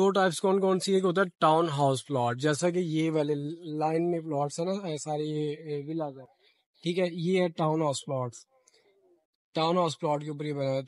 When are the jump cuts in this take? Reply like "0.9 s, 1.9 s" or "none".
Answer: none